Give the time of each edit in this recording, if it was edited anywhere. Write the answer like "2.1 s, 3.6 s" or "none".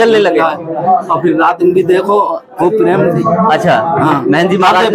none